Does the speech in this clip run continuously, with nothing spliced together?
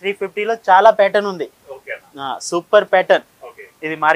yes; 0 cuts

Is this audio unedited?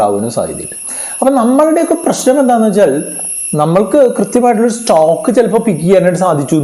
yes; 0 cuts

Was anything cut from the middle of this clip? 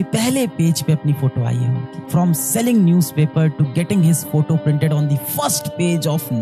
no; 0 cuts

